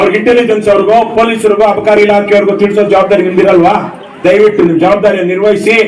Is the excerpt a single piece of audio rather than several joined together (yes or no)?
yes